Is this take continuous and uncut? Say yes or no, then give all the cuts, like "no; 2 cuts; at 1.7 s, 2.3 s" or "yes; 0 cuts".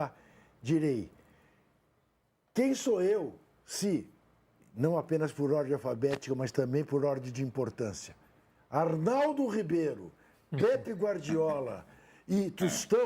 yes; 0 cuts